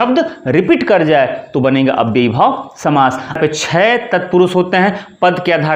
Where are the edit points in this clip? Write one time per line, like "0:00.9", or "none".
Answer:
0:03.3